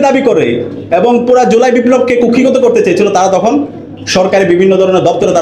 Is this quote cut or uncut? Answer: uncut